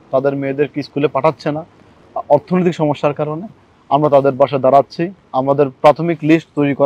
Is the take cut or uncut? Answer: uncut